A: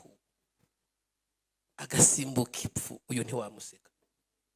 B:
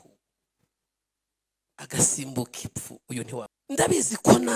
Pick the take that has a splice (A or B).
B